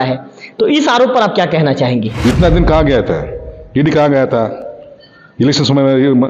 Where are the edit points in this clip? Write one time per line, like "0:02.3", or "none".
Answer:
0:02.1